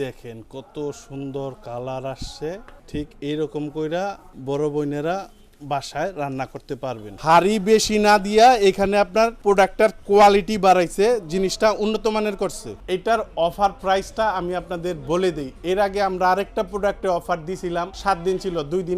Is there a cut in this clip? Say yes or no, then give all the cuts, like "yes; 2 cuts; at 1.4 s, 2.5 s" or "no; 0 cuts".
yes; 6 cuts; at 2.7 s, 4.3 s, 7.1 s, 9.4 s, 12.7 s, 17.9 s